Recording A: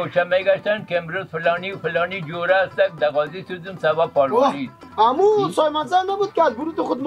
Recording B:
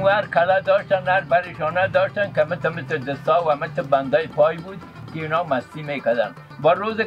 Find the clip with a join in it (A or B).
A